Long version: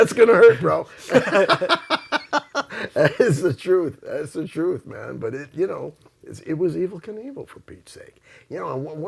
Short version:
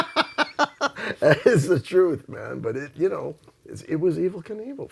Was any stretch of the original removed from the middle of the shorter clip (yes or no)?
yes